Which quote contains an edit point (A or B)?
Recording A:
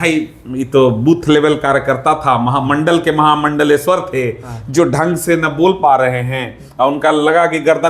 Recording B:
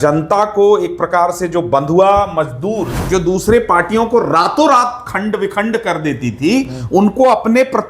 B